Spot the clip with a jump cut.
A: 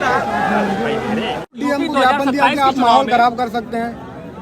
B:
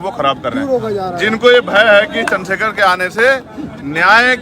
A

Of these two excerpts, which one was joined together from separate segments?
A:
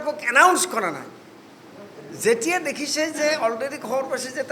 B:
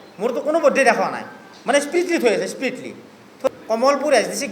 B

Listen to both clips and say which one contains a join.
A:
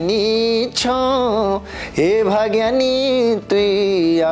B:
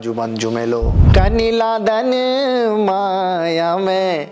B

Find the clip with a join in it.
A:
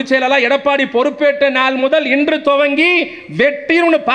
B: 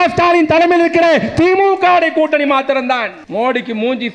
B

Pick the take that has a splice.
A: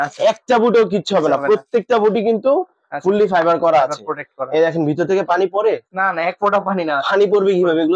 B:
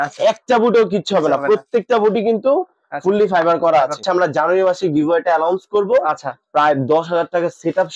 B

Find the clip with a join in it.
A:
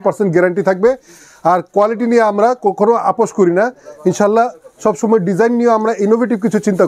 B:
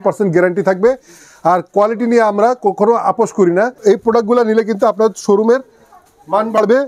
B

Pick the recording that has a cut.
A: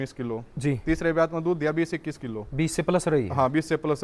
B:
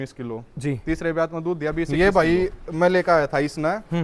B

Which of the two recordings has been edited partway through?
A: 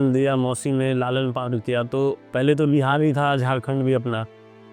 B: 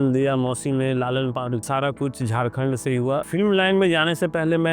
B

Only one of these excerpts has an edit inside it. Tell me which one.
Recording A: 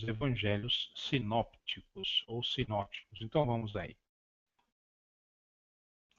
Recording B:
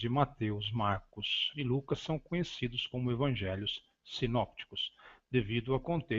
A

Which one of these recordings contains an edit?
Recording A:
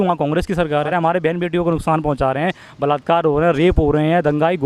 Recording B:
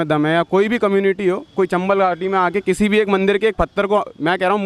A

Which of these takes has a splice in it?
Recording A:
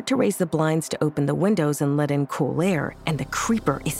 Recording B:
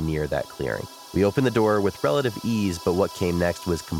B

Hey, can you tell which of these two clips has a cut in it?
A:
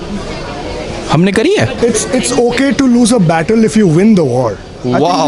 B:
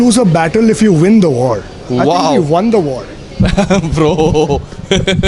A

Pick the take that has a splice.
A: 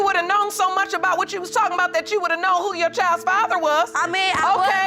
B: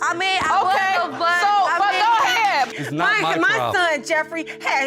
B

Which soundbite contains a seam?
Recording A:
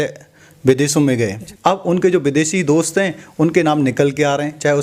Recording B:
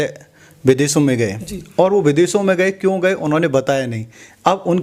A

